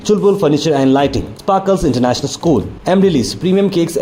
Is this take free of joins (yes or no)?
yes